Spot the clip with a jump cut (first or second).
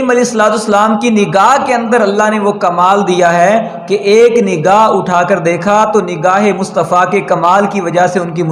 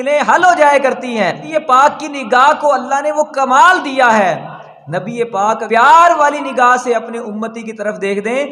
second